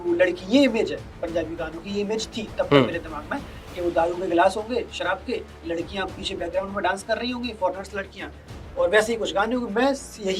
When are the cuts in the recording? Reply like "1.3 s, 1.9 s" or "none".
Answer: none

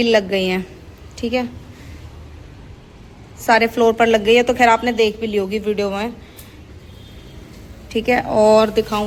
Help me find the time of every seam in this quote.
none

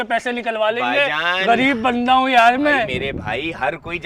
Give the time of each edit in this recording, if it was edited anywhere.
none

